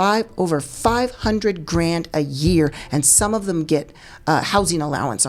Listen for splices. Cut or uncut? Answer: uncut